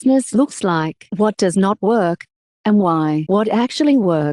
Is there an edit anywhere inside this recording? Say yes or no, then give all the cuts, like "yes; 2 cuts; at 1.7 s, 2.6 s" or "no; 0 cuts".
yes; 1 cut; at 3.2 s